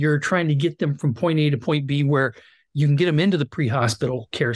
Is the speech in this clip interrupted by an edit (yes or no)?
no